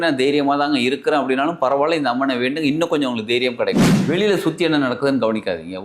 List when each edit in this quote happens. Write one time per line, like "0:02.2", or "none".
0:03.9